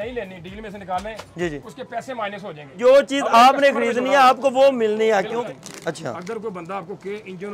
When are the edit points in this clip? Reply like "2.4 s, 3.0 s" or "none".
2.6 s, 5.4 s